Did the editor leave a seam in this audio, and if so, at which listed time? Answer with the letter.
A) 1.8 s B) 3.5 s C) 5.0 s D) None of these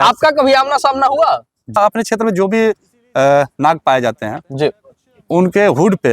A